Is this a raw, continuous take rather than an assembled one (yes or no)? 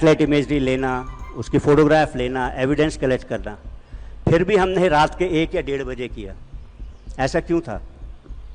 yes